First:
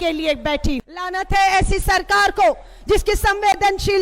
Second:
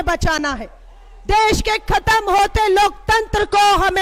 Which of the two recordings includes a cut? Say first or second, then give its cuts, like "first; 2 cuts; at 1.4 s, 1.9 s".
first; 1 cut; at 1.0 s